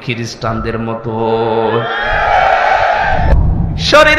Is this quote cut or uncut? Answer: cut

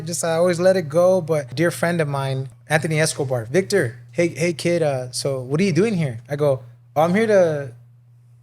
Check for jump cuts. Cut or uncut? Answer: cut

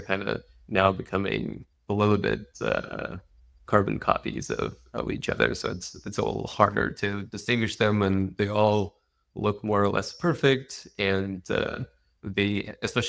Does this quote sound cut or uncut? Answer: uncut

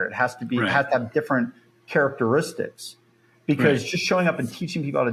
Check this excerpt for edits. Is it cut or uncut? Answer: uncut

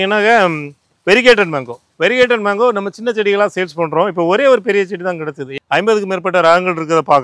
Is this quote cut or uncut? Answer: cut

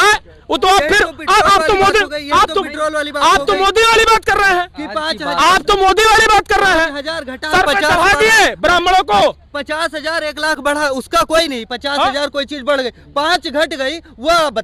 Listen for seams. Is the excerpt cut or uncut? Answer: uncut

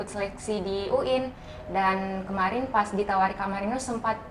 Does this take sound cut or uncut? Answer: uncut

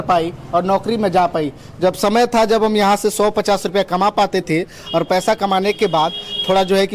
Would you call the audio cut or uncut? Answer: uncut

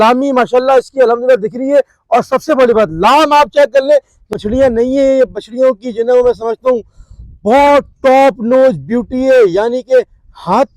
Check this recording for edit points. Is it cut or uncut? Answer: cut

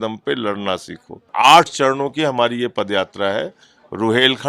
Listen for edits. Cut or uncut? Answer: cut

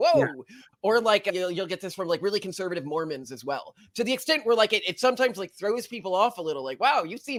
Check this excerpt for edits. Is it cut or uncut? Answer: uncut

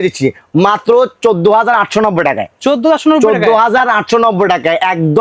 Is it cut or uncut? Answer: uncut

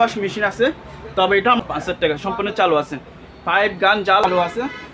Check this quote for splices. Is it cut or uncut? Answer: cut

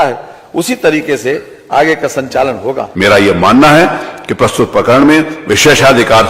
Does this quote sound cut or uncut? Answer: cut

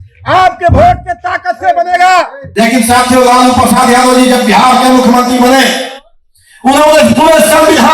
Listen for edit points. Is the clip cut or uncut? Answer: cut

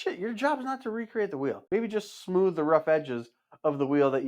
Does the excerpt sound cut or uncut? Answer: cut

